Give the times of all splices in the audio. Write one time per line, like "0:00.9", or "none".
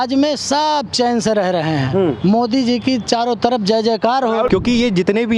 0:04.5